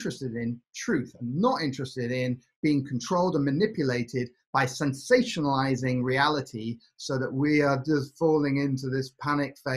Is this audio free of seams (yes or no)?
yes